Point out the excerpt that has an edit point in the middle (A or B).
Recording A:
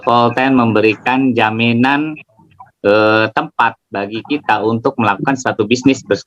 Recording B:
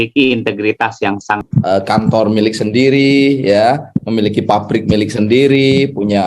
B